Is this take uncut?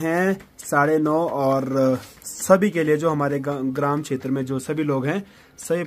yes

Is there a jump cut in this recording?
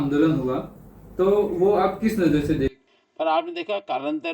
yes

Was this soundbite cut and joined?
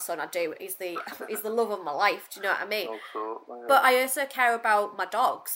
no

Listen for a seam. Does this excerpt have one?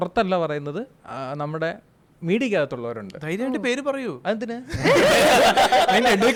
no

